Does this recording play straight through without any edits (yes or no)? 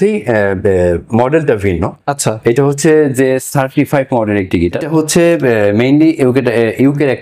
no